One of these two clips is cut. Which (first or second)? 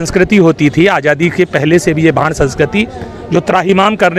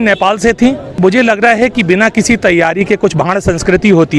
second